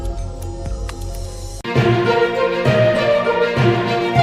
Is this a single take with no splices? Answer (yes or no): yes